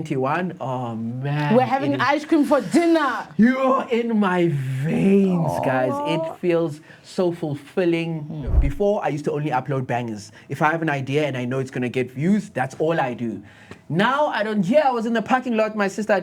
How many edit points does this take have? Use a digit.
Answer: 1